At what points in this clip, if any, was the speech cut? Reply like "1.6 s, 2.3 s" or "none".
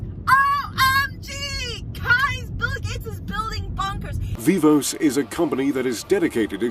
4.3 s